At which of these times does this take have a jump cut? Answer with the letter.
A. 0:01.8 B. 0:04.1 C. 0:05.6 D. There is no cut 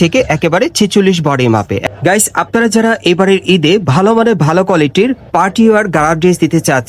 A